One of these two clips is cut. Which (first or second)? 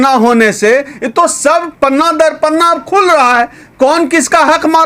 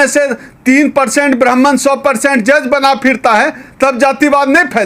first